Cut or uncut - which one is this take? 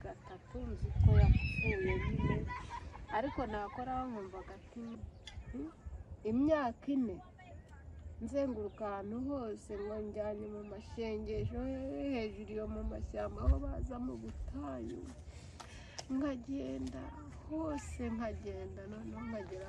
cut